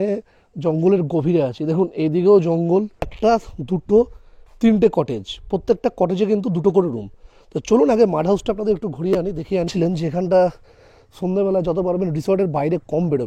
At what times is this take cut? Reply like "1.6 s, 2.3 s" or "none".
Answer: 3.1 s, 9.7 s